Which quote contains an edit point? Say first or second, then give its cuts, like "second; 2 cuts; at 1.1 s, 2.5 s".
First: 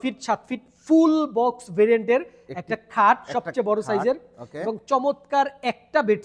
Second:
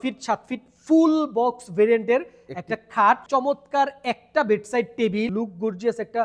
second; 2 cuts; at 3.2 s, 5.3 s